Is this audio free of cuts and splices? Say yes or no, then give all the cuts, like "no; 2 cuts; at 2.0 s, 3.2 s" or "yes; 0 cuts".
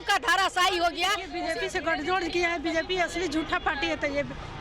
no; 1 cut; at 1.3 s